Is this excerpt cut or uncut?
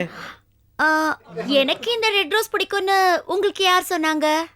cut